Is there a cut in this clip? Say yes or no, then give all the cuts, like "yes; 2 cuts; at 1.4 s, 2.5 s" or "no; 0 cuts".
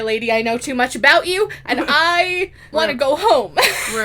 yes; 1 cut; at 2.6 s